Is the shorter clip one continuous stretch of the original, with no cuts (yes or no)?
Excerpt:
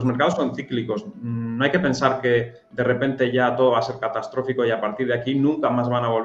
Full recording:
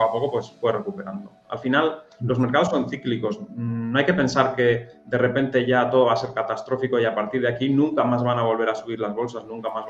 yes